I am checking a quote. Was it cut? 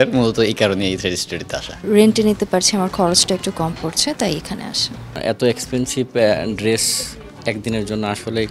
yes; 2 cuts; at 1.8 s, 5.2 s

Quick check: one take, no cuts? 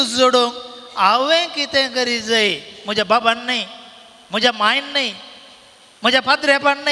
yes; 0 cuts

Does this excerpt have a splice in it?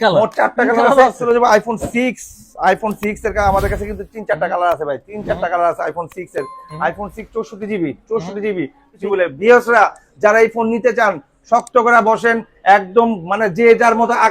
yes; 2 cuts; at 1.2 s, 9.0 s

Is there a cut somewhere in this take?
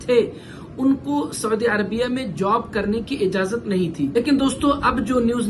yes; 1 cut; at 4.1 s

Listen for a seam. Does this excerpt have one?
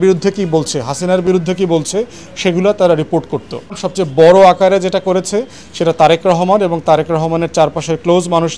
yes; 1 cut; at 3.8 s

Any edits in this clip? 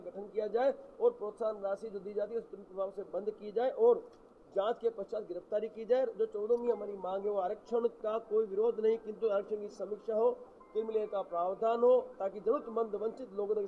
no; 0 cuts

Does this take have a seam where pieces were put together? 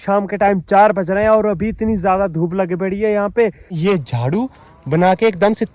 yes; 1 cut; at 3.8 s

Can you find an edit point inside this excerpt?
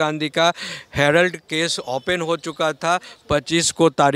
no; 0 cuts

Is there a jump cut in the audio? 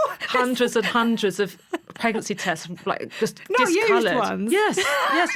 no; 0 cuts

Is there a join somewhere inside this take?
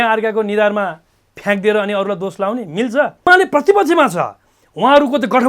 yes; 1 cut; at 3.2 s

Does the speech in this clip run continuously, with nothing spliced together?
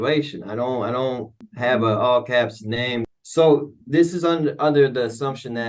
no; 2 cuts; at 1.4 s, 3.1 s

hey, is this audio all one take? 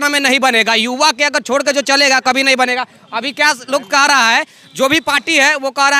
yes; 0 cuts

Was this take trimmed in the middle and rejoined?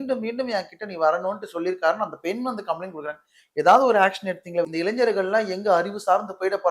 yes; 1 cut; at 4.7 s

